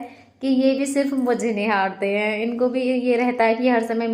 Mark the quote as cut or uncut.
uncut